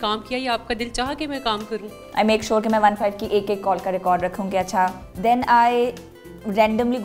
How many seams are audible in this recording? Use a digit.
2